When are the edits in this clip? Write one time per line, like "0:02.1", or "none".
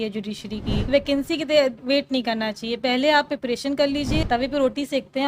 0:00.9
0:04.2